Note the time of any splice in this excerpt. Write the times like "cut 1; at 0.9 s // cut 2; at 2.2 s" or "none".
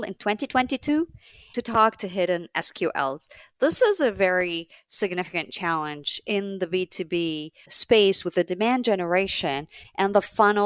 cut 1; at 7.7 s